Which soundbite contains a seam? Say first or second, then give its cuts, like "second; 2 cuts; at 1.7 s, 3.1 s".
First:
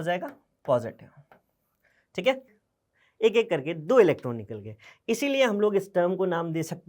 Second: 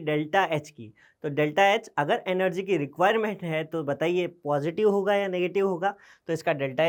first; 1 cut; at 2.5 s